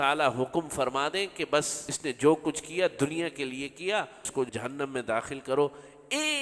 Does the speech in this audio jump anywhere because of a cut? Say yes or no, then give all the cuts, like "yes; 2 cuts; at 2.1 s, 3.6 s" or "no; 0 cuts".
yes; 2 cuts; at 1.8 s, 4.3 s